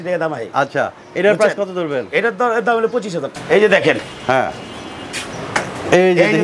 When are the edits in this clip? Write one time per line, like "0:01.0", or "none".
0:03.3